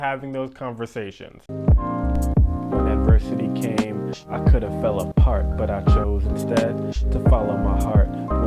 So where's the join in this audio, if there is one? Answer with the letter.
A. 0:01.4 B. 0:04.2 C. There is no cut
A